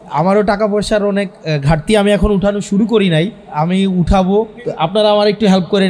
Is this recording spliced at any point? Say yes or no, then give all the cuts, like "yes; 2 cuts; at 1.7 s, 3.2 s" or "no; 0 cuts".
yes; 2 cuts; at 3.4 s, 4.6 s